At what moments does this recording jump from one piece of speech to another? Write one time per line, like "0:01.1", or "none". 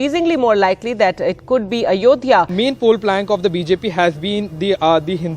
0:02.5